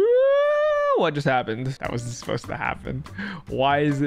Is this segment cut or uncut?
cut